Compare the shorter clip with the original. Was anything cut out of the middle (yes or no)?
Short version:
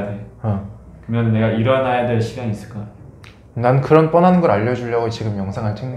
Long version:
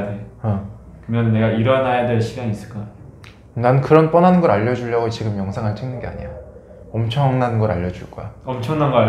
no